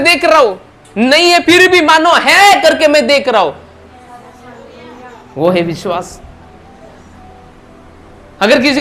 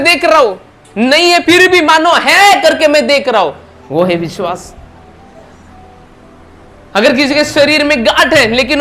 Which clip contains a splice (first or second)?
second